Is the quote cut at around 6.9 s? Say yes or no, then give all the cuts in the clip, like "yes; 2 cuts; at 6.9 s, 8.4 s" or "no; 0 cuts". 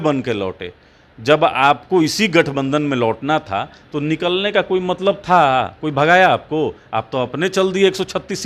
no; 0 cuts